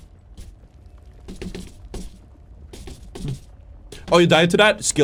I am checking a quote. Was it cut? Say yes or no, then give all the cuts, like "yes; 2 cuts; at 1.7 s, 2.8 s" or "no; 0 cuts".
no; 0 cuts